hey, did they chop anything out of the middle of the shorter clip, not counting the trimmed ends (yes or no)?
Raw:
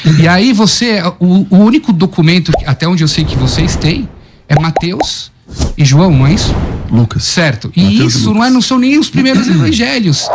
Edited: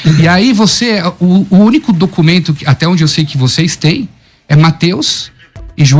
no